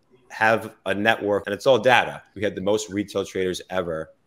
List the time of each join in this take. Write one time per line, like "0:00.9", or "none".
0:01.4
0:02.2